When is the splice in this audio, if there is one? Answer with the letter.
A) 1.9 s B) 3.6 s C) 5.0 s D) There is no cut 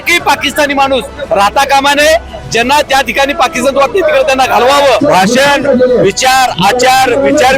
C